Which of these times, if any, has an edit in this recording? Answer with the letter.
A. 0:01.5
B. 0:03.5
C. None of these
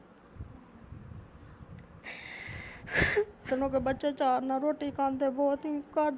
B